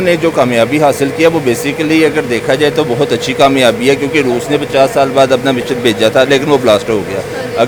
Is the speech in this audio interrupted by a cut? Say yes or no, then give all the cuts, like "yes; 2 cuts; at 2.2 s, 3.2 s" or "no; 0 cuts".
no; 0 cuts